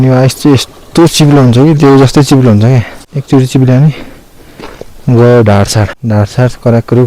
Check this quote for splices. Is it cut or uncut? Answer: cut